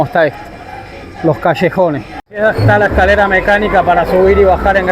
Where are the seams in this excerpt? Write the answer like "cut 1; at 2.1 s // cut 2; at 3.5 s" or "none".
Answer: cut 1; at 2.2 s